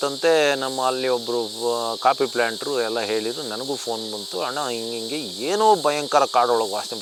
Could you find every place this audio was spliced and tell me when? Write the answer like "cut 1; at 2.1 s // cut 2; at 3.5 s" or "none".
none